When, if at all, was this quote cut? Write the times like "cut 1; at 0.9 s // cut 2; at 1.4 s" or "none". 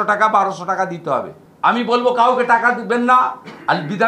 cut 1; at 1.4 s